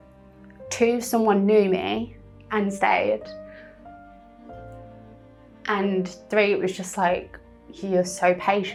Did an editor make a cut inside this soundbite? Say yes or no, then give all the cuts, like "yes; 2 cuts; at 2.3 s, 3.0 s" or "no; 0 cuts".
no; 0 cuts